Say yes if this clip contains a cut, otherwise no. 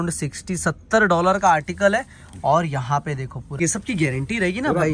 yes